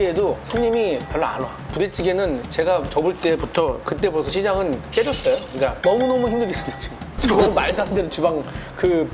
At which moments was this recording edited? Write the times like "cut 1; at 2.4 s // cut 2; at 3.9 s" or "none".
cut 1; at 1.7 s // cut 2; at 5.8 s